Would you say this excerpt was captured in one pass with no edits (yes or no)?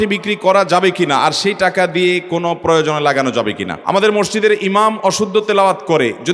no